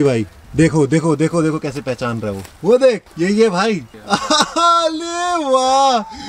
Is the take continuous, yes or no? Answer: no